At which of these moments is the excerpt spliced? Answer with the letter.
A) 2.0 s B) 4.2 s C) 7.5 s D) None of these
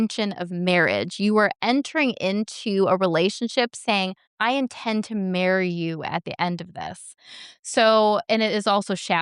B